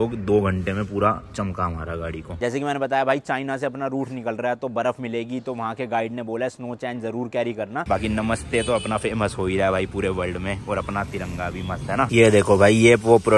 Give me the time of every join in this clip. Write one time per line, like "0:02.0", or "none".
0:02.3
0:07.8
0:12.1